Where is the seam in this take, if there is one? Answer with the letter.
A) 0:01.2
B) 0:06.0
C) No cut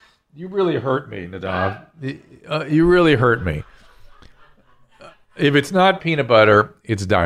B